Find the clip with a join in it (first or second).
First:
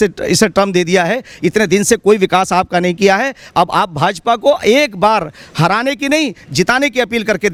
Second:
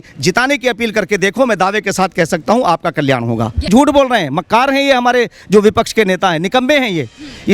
second